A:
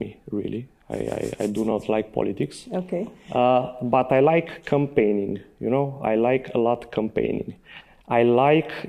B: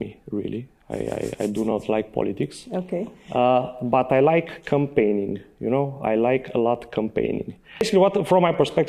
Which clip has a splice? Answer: B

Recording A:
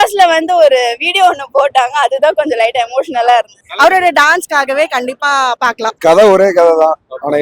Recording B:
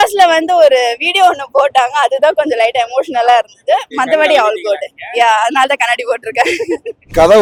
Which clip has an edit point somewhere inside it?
A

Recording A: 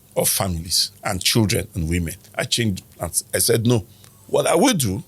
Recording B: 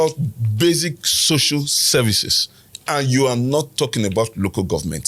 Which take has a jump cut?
A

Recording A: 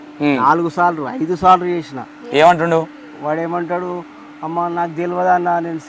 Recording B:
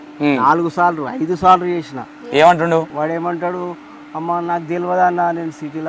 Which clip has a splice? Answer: B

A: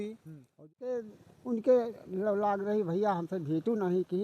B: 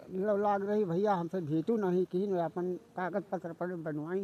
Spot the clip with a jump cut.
A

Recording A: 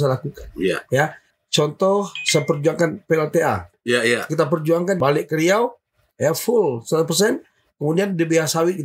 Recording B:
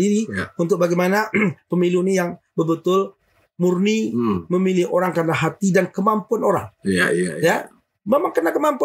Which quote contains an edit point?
A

